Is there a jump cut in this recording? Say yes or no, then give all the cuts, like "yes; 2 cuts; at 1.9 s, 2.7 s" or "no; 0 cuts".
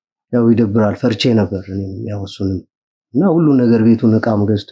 no; 0 cuts